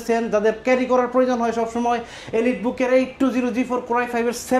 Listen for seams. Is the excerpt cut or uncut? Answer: uncut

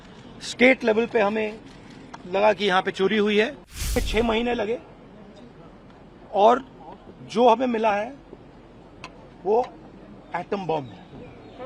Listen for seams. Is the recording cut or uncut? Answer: cut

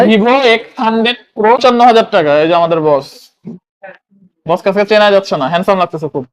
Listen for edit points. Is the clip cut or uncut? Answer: cut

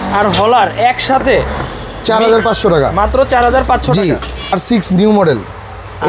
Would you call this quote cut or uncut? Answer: cut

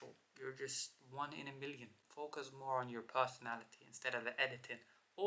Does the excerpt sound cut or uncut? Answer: cut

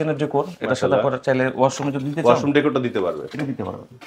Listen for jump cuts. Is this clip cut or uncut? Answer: uncut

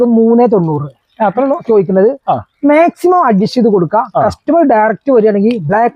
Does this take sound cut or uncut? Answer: uncut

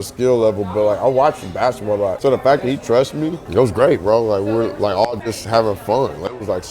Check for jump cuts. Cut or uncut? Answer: cut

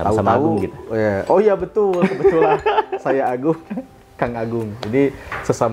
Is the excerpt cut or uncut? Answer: uncut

